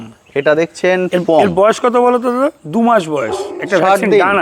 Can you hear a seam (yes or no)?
no